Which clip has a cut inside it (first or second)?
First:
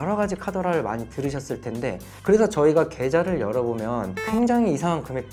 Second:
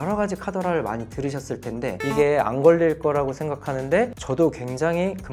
second